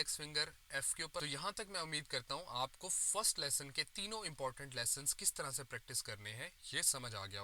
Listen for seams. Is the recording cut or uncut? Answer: cut